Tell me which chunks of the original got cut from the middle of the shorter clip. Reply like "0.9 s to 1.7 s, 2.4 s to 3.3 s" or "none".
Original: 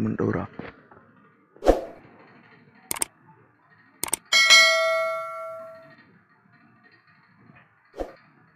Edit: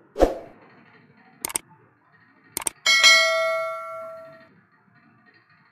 5.9 s to 6.0 s